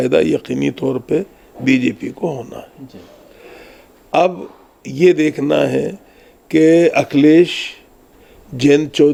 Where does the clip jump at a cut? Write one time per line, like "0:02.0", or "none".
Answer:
none